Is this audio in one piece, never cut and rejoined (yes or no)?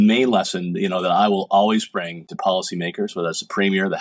no